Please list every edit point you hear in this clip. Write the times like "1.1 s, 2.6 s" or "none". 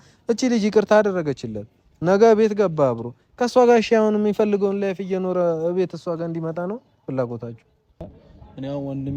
8.1 s